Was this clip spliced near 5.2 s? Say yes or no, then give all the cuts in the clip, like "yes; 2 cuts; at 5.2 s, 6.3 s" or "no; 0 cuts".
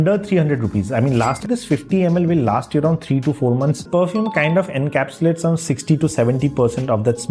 no; 2 cuts; at 1.4 s, 3.8 s